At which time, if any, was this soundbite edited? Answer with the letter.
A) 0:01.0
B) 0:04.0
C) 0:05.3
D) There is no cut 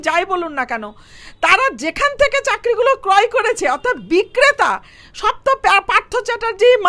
D